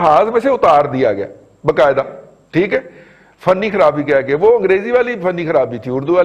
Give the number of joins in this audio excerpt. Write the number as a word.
zero